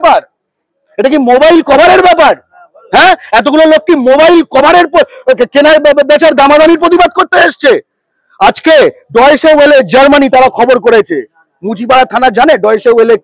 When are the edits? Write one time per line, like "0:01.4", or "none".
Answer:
none